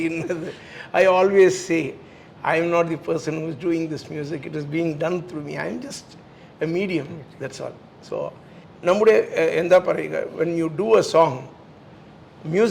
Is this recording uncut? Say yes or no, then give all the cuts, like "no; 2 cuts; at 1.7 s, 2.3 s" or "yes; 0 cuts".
yes; 0 cuts